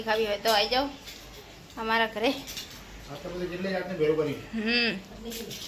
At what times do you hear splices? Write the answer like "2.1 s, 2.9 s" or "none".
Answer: none